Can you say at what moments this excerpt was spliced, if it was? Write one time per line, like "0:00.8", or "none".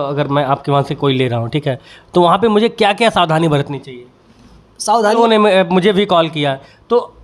0:05.2

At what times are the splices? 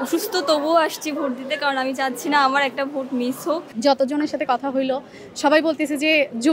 0:03.7

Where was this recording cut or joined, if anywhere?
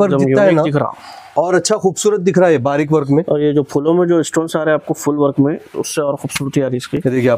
none

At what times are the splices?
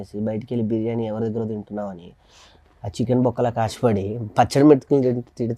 none

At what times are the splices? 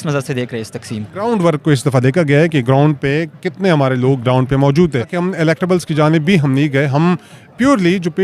0:01.2
0:05.2

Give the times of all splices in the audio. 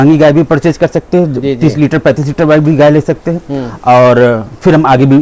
none

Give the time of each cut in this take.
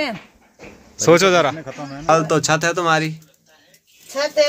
0:02.1

